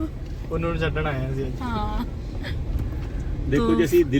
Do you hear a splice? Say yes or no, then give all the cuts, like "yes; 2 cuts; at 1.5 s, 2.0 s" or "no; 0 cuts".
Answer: no; 0 cuts